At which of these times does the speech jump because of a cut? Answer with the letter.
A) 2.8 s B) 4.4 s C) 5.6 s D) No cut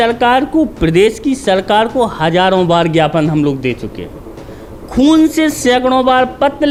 D